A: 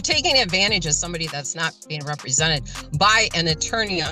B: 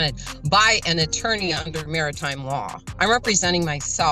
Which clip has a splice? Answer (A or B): B